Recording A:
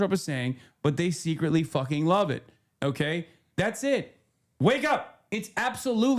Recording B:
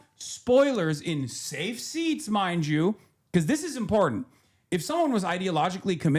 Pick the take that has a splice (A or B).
A